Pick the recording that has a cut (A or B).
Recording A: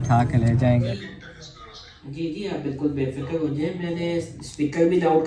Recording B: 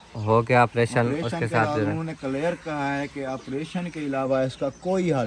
A